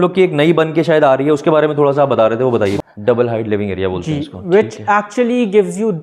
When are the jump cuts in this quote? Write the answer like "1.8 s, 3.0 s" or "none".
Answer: 2.8 s